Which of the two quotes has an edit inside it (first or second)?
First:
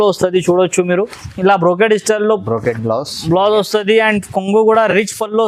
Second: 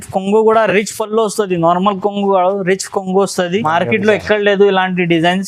second